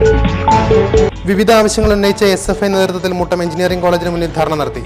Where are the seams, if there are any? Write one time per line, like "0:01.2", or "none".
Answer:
none